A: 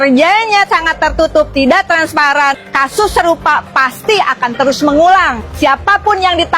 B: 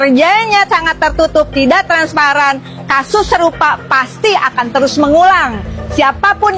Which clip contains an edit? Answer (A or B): A